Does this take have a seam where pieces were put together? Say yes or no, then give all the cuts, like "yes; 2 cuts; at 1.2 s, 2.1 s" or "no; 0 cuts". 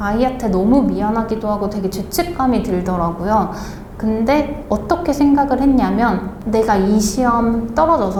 no; 0 cuts